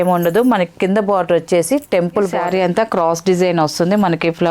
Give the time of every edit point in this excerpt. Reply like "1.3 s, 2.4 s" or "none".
2.4 s